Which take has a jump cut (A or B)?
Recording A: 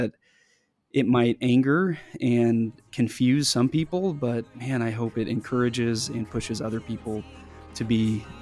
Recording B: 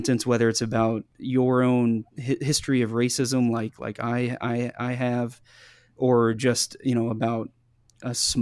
B